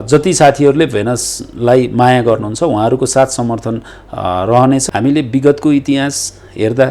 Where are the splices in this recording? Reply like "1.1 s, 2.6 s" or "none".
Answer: 4.8 s

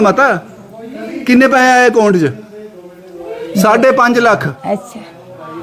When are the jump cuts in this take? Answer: none

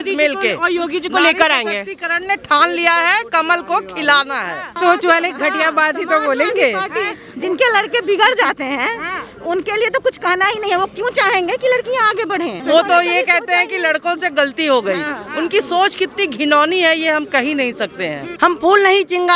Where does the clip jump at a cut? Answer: 4.7 s, 12.6 s, 18.2 s

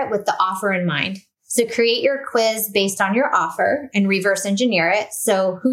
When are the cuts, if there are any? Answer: none

